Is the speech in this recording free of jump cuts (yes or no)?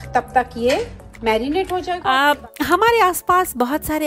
no